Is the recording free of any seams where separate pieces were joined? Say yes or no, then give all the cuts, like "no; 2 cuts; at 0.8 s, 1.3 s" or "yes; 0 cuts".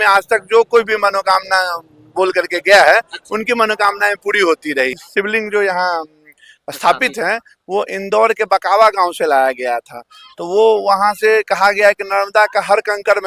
no; 1 cut; at 5.0 s